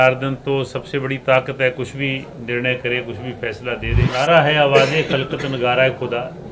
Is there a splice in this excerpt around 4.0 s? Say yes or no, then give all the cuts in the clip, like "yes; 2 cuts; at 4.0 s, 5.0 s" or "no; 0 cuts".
yes; 1 cut; at 4.0 s